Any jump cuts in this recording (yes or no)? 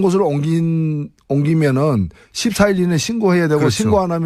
no